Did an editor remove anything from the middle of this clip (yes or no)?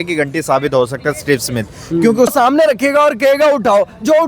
yes